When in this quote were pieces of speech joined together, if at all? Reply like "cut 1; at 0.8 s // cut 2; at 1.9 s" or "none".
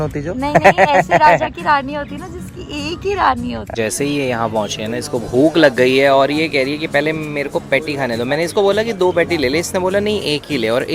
cut 1; at 3.6 s